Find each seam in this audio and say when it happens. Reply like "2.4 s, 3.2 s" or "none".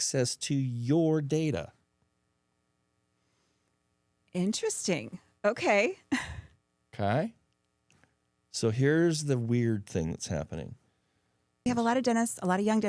11.7 s

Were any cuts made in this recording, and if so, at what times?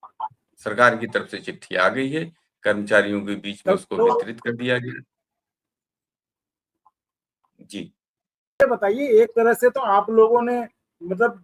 8.6 s

